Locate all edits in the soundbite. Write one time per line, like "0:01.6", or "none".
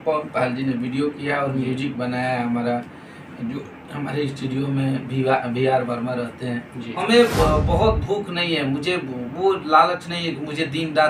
0:07.0